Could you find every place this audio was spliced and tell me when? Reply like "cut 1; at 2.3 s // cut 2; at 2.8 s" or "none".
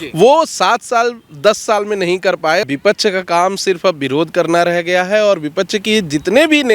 cut 1; at 2.6 s